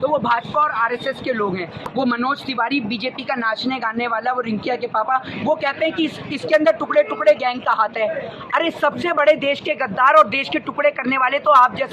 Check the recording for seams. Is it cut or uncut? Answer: cut